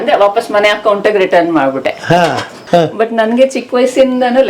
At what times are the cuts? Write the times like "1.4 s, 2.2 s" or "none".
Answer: 2.6 s